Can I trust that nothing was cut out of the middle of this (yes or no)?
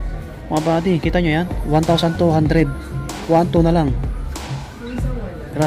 yes